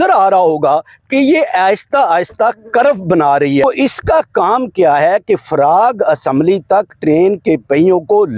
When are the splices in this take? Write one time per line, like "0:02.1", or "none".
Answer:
0:03.6